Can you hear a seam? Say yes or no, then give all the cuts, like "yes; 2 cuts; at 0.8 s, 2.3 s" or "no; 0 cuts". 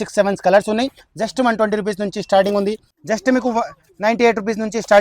yes; 1 cut; at 2.9 s